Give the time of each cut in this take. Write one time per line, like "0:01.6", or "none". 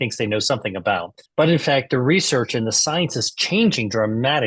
0:01.2

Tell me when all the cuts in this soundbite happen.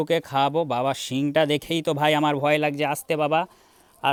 none

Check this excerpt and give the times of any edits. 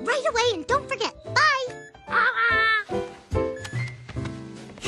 0:02.8

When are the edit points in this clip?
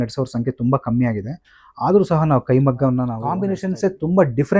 0:03.4

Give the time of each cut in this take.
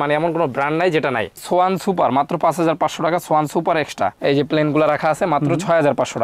0:01.4
0:04.2

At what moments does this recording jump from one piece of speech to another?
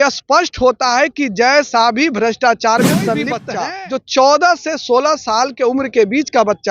0:03.5

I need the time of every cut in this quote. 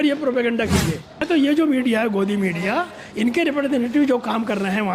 0:01.2

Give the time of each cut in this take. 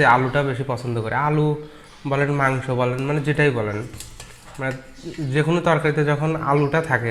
none

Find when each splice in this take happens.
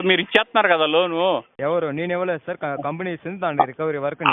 0:01.5

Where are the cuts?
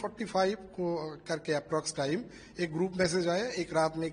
none

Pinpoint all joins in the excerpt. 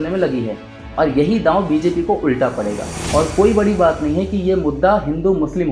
0:03.0

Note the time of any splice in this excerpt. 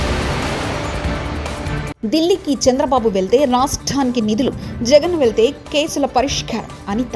0:01.9

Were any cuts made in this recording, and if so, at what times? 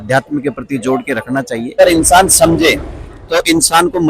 0:01.8

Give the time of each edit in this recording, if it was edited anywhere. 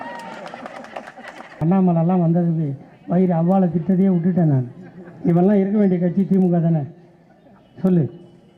0:01.6

